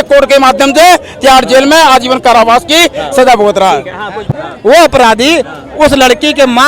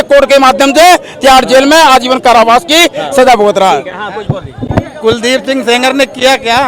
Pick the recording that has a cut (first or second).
first